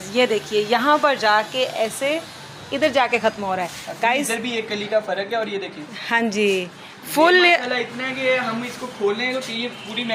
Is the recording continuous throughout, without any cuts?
yes; 0 cuts

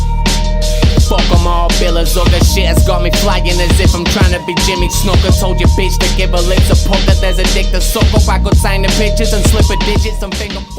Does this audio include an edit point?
yes; 1 cut; at 5.8 s

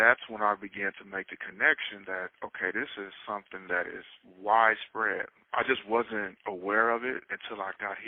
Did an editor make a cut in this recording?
no; 0 cuts

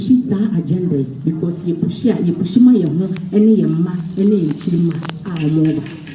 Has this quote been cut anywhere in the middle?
no; 0 cuts

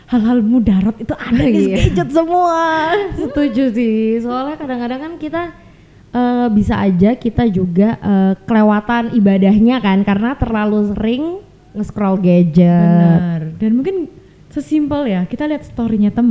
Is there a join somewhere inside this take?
no; 0 cuts

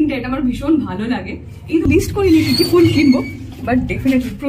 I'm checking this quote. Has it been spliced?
yes; 1 cut; at 1.8 s

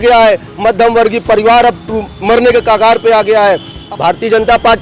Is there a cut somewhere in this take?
yes; 1 cut; at 3.7 s

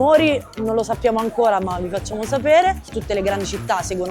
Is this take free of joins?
no; 1 cut; at 2.9 s

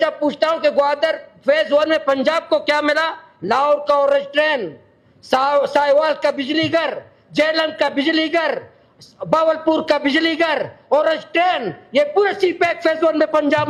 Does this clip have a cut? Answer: no; 0 cuts

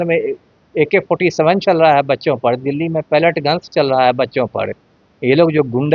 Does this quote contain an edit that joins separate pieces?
no; 0 cuts

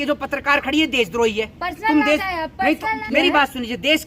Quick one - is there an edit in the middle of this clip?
yes; 1 cut; at 3.0 s

